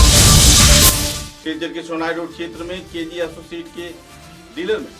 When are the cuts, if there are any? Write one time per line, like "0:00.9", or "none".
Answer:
0:00.9